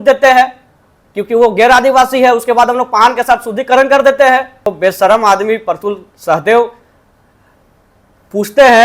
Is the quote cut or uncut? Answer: cut